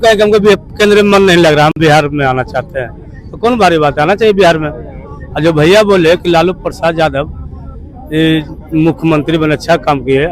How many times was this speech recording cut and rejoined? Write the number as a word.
zero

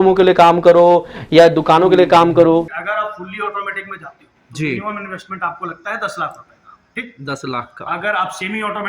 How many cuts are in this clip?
one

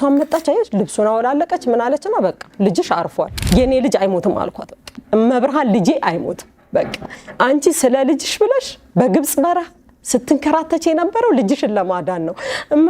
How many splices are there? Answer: one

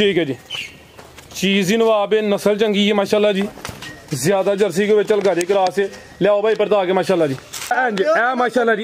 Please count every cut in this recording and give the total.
one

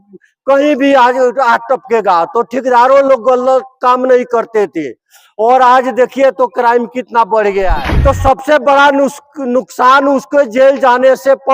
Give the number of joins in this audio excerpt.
one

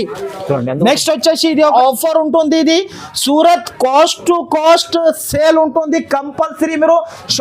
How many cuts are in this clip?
one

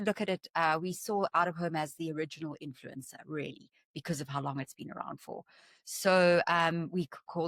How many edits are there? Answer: zero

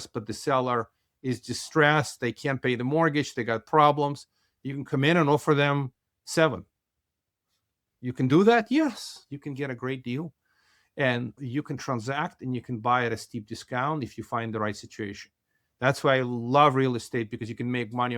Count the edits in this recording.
one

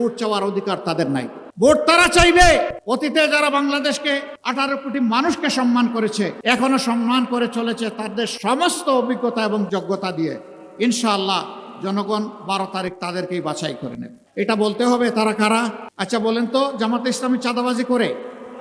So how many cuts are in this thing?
six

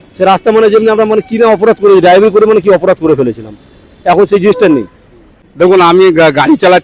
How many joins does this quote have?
one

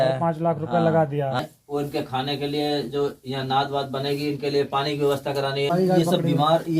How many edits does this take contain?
two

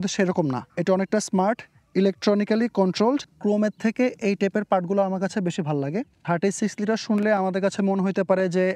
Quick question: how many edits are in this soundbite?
two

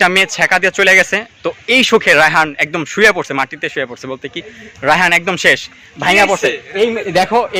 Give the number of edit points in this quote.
zero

